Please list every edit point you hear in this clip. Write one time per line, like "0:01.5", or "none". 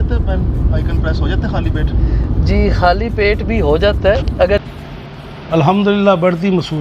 0:04.6